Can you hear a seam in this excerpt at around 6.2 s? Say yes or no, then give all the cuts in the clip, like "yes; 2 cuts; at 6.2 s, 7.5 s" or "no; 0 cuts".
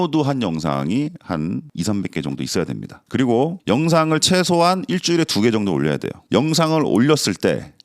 yes; 1 cut; at 6.2 s